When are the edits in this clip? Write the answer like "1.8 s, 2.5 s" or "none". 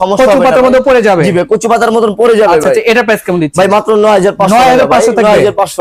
none

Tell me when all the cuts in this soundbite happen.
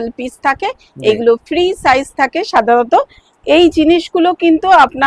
none

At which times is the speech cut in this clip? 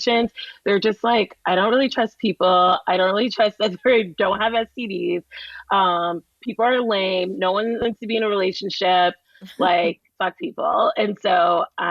10.1 s

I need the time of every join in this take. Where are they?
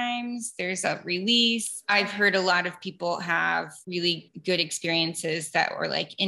1.8 s, 4.1 s

